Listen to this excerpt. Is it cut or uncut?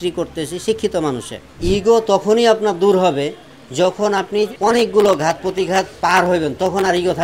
cut